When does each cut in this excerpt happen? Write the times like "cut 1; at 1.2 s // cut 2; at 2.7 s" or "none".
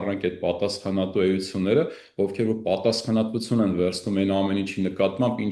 none